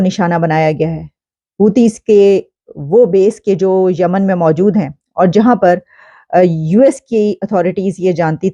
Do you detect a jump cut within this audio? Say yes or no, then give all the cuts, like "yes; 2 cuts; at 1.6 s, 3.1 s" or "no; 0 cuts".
no; 0 cuts